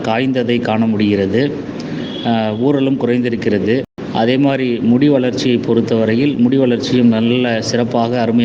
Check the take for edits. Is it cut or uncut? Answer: cut